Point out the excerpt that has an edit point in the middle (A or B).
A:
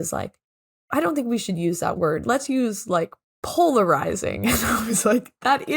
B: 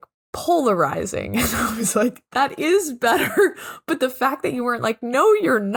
A